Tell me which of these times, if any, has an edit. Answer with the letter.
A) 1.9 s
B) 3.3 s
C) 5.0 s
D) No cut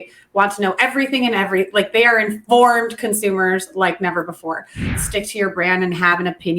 C